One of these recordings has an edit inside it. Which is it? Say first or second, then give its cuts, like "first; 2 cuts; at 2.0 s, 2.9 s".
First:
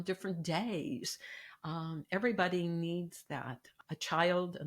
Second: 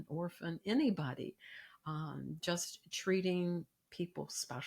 first; 1 cut; at 3.7 s